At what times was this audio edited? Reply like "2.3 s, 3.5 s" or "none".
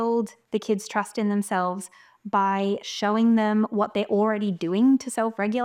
none